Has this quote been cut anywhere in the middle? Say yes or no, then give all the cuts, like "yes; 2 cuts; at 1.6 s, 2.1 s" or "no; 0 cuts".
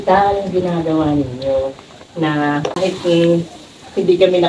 yes; 1 cut; at 2.8 s